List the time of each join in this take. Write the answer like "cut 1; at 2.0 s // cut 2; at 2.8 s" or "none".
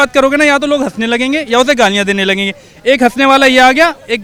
none